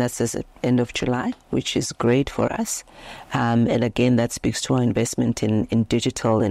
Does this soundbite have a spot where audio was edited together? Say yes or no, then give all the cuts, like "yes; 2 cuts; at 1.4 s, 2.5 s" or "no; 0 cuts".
no; 0 cuts